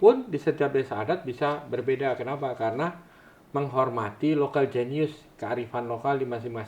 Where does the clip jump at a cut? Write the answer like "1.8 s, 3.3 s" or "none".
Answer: none